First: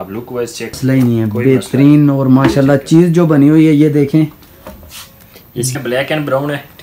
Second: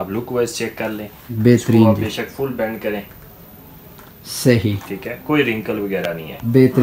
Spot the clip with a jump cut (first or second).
first